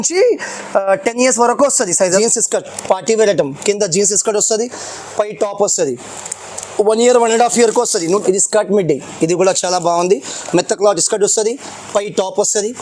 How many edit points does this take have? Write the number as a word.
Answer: two